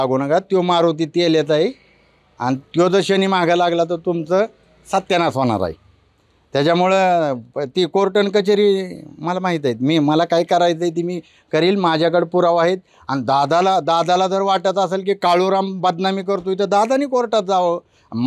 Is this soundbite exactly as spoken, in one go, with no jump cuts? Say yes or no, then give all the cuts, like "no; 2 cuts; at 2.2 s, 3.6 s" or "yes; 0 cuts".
yes; 0 cuts